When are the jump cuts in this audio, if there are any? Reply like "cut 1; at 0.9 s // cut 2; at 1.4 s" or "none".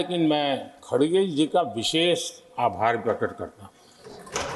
none